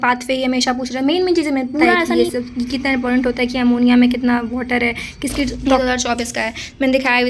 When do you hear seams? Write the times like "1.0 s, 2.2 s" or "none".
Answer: 2.1 s, 5.6 s